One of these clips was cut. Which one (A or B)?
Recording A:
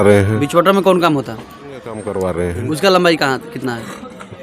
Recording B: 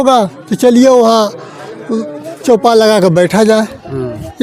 A